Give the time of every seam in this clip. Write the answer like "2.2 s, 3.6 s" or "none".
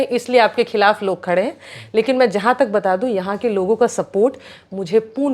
none

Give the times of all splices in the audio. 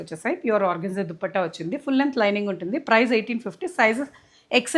none

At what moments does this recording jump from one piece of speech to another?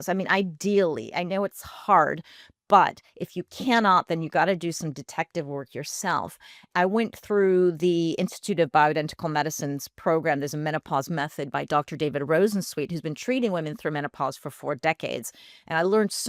6.7 s

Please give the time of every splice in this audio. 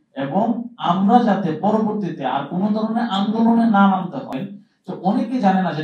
4.3 s

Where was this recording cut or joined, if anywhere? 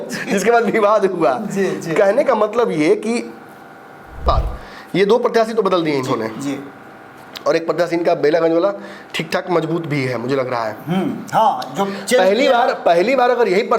4.2 s

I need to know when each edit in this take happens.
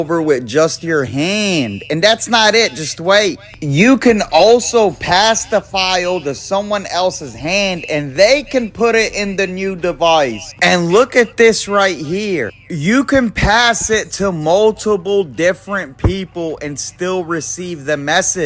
7.7 s

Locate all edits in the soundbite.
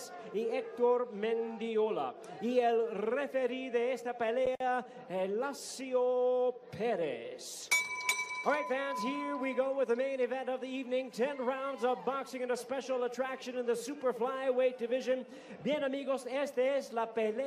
none

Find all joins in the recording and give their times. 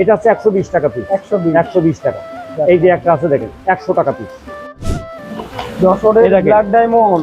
4.7 s

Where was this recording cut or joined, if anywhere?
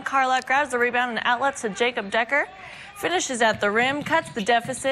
none

